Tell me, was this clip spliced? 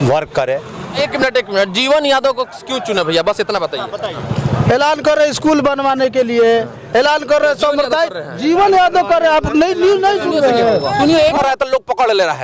yes; 3 cuts; at 0.9 s, 4.2 s, 11.4 s

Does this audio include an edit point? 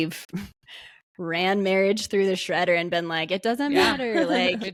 no; 0 cuts

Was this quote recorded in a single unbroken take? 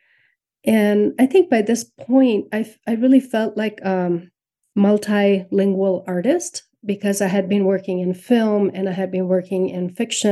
yes; 0 cuts

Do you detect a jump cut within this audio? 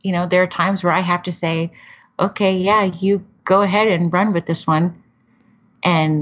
no; 0 cuts

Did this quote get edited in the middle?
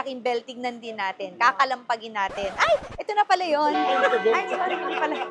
no; 0 cuts

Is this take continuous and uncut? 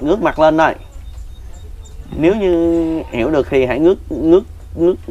yes; 0 cuts

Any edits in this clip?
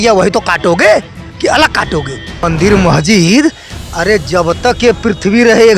yes; 1 cut; at 2.5 s

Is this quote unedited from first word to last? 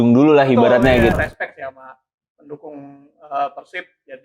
no; 1 cut; at 1.1 s

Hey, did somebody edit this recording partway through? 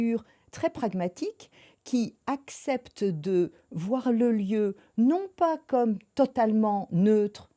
no; 0 cuts

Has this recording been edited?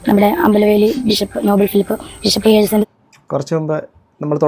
no; 0 cuts

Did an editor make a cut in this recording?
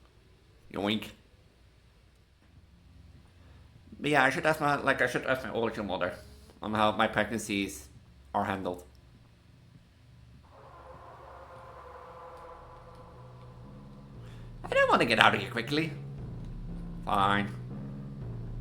yes; 1 cut; at 2.4 s

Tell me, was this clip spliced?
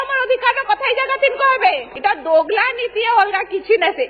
yes; 1 cut; at 1.9 s

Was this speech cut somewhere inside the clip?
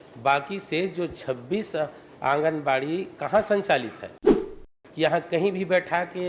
yes; 1 cut; at 4.6 s

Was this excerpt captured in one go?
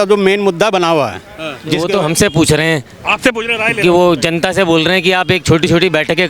no; 1 cut; at 1.8 s

